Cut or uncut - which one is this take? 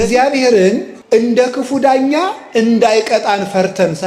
cut